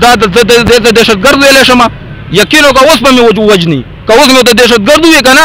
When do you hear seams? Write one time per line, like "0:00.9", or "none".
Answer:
none